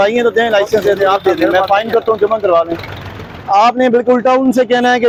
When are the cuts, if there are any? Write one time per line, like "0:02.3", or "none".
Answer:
none